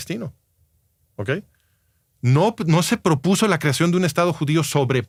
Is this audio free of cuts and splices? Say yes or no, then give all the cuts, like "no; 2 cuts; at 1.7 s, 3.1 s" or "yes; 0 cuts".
yes; 0 cuts